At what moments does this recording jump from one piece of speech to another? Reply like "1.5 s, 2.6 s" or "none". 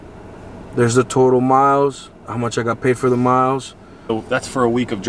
4.1 s